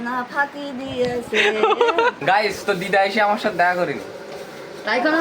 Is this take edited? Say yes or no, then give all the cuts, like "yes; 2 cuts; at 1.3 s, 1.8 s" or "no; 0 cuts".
yes; 1 cut; at 2.2 s